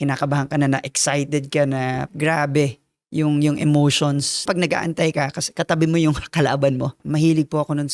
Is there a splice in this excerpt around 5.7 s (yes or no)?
no